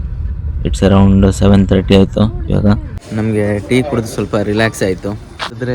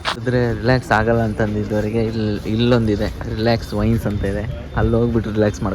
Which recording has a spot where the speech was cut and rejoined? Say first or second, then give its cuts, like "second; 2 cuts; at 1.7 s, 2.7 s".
first; 1 cut; at 3.0 s